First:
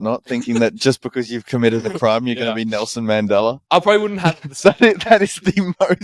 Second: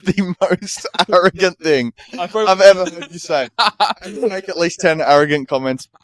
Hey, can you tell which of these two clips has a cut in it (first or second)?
first